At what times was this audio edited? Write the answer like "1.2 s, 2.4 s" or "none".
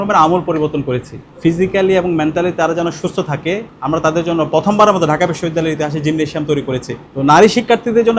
1.3 s, 7.0 s